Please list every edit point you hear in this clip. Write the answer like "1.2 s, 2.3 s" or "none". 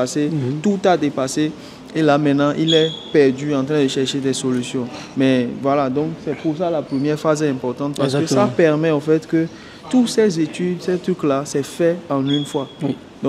none